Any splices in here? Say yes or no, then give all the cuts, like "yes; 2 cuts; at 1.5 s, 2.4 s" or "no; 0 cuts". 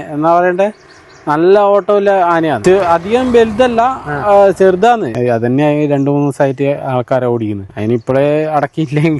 yes; 3 cuts; at 2.6 s, 5.1 s, 7.7 s